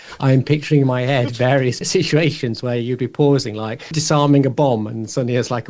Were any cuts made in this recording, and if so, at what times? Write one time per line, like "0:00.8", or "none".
0:01.8
0:04.0